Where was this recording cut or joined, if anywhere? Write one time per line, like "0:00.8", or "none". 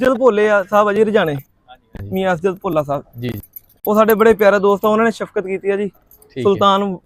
none